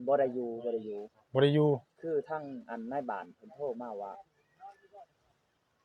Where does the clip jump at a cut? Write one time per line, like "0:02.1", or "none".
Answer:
none